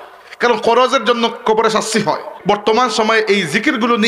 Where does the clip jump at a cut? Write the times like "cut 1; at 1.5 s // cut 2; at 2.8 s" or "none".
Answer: cut 1; at 2.3 s